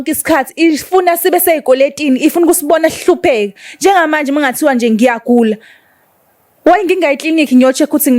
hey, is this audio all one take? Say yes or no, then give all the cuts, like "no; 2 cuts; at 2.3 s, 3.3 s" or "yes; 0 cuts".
yes; 0 cuts